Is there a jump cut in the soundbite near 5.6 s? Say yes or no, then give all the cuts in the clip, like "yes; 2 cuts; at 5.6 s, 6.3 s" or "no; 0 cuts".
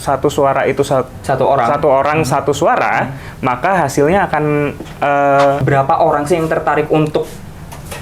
yes; 1 cut; at 5.6 s